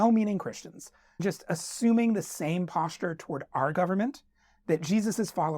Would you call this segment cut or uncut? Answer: cut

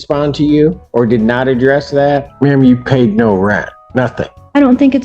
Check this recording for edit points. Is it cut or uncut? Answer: cut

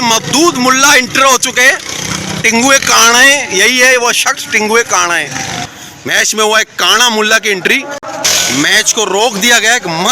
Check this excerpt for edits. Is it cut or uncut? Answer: cut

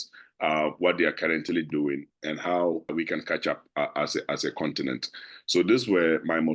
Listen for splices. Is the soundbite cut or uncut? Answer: cut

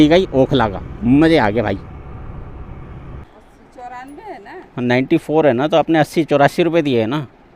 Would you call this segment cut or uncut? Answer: cut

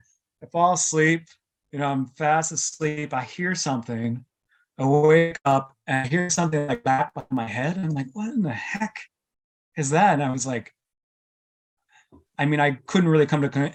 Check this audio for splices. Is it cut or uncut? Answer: uncut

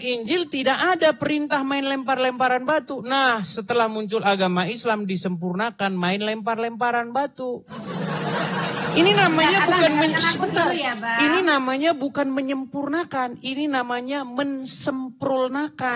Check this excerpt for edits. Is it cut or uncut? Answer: uncut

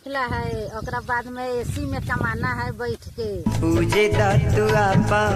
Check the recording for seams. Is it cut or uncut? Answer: uncut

